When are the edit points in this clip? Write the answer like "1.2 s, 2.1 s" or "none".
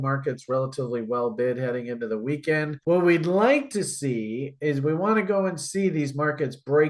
none